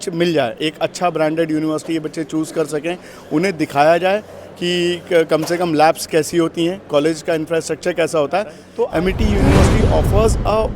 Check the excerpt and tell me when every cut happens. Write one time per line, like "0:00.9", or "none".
0:08.6